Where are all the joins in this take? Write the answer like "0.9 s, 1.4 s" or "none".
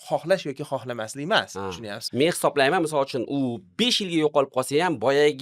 2.0 s